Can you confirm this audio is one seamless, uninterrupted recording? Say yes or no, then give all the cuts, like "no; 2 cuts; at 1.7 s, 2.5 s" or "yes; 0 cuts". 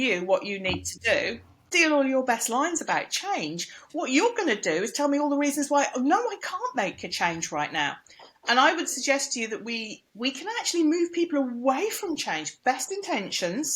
no; 1 cut; at 1.7 s